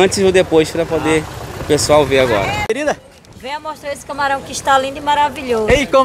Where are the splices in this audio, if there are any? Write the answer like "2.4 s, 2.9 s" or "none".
2.7 s